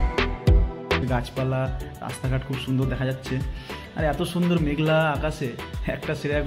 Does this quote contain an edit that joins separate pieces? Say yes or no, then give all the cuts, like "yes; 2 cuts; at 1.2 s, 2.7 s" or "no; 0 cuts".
yes; 1 cut; at 1.0 s